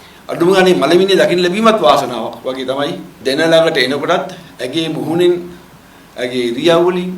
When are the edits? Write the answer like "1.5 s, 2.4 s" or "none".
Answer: 3.1 s